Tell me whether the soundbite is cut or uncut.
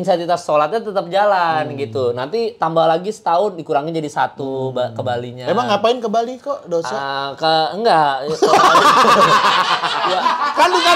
uncut